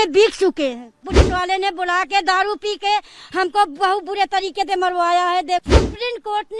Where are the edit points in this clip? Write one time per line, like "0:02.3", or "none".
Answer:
0:01.1
0:05.6